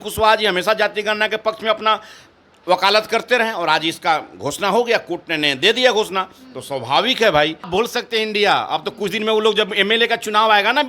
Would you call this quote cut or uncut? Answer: cut